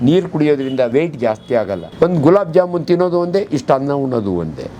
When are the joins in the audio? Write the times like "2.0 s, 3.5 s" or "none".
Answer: 0.9 s, 1.9 s